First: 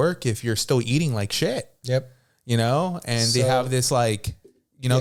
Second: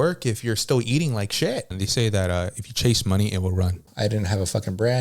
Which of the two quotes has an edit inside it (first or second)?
second